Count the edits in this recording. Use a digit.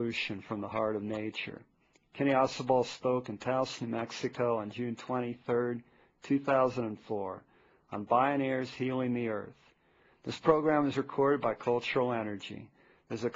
1